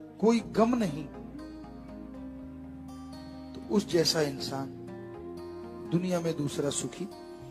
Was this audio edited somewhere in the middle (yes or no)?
no